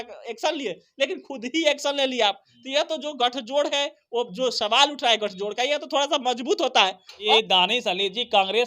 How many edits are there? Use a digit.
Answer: 1